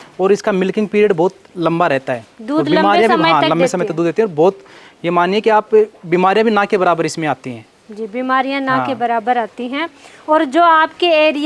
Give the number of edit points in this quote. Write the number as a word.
zero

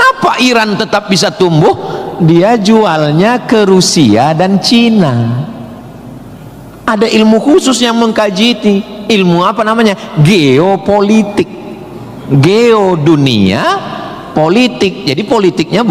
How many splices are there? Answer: one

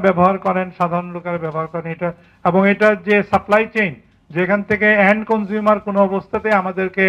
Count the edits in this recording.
zero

